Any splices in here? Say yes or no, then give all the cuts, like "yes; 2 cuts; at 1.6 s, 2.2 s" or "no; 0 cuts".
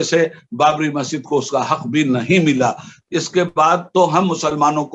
no; 0 cuts